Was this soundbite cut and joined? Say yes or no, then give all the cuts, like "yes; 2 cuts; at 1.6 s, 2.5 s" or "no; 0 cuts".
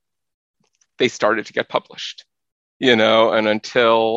no; 0 cuts